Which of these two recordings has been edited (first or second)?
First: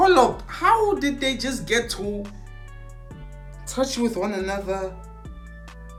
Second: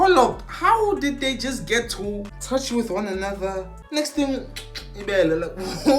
second